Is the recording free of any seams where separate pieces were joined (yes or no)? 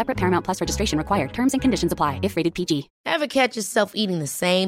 no